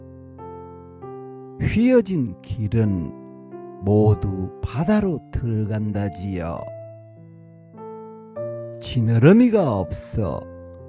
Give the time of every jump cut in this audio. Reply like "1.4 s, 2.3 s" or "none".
1.5 s